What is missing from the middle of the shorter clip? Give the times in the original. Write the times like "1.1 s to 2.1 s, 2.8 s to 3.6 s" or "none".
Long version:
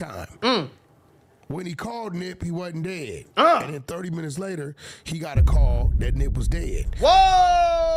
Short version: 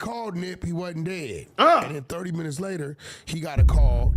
none